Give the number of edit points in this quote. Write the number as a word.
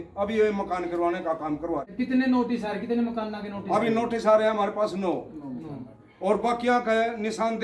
one